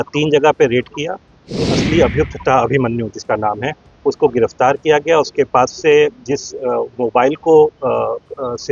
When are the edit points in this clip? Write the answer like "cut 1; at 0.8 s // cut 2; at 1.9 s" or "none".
cut 1; at 1.7 s